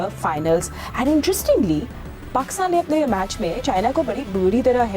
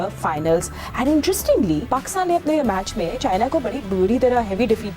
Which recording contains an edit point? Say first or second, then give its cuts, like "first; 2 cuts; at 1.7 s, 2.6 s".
second; 1 cut; at 1.8 s